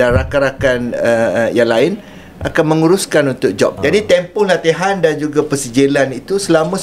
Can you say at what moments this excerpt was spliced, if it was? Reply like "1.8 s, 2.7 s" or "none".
3.8 s